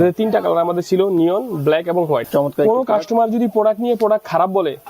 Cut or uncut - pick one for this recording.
cut